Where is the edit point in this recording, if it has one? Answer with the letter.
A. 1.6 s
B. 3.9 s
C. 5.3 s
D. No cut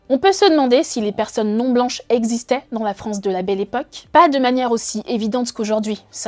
B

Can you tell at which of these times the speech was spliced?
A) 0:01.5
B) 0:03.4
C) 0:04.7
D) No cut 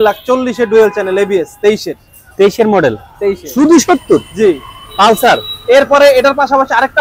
B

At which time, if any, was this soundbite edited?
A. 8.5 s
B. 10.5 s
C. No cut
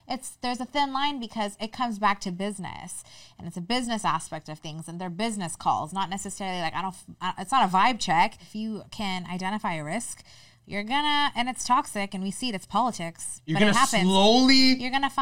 A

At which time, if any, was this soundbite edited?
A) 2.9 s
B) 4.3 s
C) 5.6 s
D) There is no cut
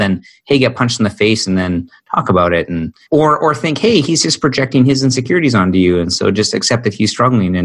A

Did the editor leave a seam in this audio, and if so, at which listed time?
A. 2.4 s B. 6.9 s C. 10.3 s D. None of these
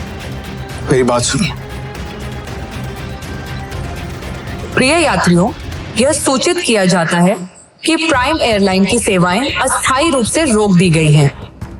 A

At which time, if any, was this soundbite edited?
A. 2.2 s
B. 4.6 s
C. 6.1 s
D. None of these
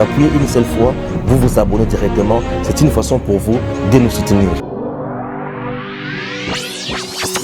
D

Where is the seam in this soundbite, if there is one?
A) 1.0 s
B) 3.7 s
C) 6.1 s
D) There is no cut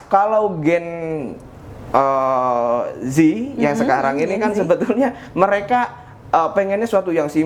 D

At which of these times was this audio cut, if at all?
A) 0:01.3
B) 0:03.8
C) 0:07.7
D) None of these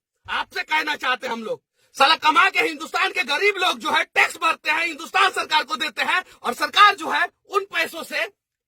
A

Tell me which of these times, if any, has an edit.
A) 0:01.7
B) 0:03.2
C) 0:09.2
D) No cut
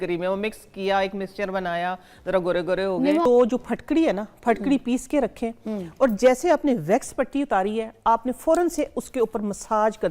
B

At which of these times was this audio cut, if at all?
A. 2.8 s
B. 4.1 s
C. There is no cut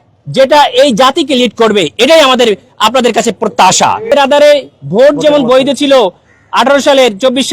B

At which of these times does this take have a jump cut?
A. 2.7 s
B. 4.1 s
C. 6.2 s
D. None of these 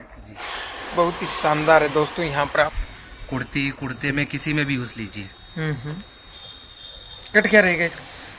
A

